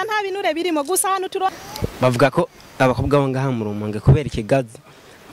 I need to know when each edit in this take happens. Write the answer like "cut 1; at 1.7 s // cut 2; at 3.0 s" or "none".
cut 1; at 1.5 s